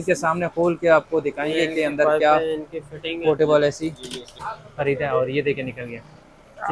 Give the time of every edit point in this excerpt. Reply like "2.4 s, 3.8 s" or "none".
4.4 s